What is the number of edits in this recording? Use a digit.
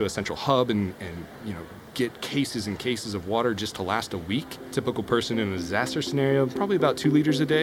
1